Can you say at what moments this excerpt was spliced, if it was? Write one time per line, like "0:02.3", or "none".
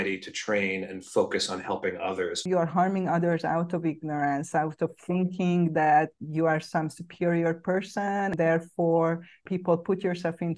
0:02.4
0:06.2
0:08.3
0:09.4